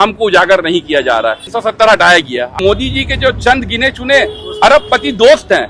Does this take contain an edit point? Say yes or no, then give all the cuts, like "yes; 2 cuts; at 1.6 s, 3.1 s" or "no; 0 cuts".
yes; 2 cuts; at 1.5 s, 2.6 s